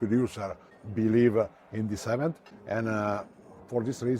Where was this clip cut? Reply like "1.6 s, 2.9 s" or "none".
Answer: 2.4 s